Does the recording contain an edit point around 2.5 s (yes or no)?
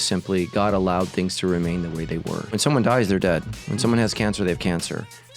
yes